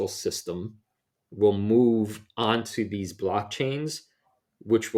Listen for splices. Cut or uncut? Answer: uncut